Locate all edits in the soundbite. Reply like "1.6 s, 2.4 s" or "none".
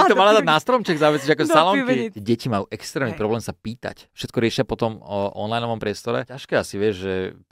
2.1 s, 4.1 s, 6.4 s